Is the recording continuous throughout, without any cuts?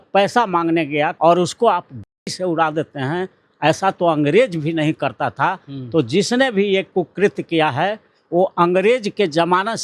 no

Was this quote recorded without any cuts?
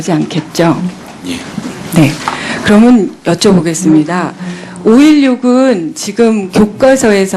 no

